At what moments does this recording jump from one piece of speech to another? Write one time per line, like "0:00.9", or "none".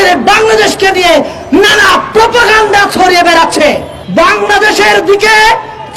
0:03.9